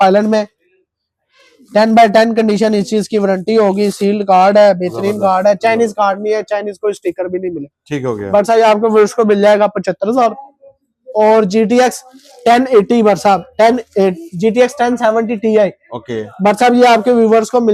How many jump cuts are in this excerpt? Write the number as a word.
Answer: zero